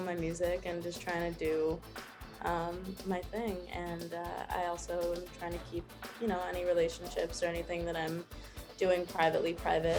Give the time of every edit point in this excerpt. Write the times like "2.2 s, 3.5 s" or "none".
none